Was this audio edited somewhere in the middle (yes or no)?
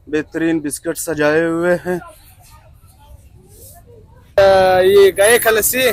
yes